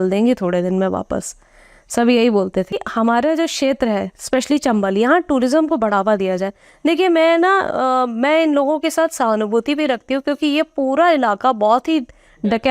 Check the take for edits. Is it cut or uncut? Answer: cut